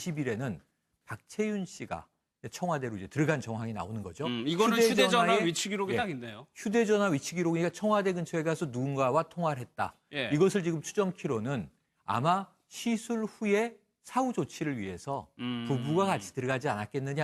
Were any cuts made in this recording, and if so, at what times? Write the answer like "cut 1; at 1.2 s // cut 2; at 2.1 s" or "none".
none